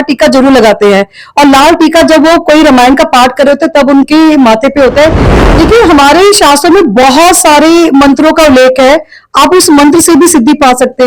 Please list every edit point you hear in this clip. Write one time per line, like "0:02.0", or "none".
0:05.3

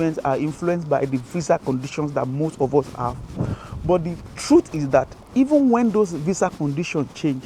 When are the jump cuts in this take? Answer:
none

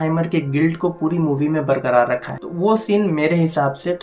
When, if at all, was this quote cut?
0:02.4

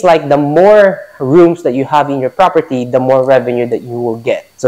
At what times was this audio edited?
none

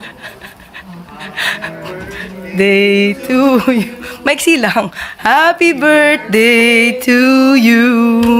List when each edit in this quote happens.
none

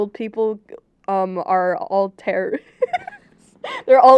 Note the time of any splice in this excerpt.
none

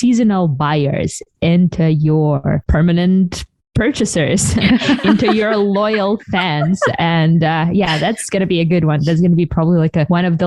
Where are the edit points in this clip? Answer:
none

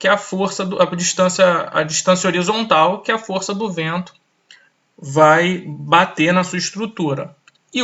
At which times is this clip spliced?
none

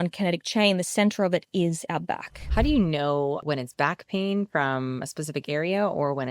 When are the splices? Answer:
0:02.3
0:03.4

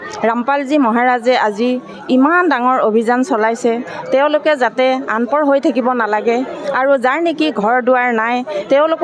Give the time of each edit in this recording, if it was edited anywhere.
none

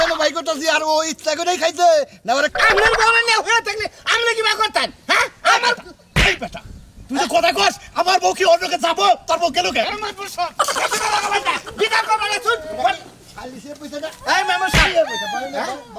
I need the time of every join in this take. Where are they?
0:02.5

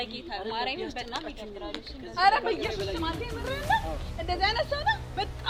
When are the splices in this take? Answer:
none

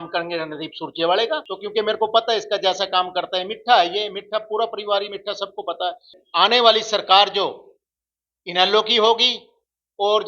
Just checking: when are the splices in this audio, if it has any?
0:01.5
0:06.1

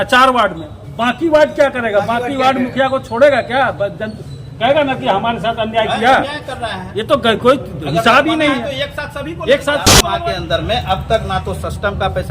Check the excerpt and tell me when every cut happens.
0:10.0

